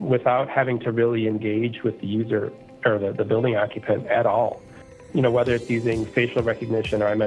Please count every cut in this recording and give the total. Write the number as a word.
one